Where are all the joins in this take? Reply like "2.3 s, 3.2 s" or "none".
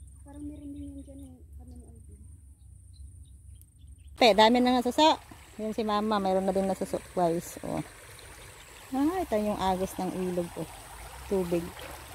4.2 s